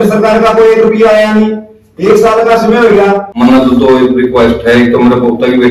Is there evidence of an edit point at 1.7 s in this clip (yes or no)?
no